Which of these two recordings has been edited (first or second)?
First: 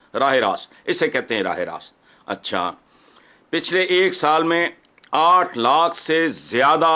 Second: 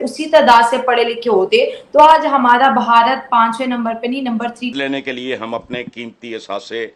second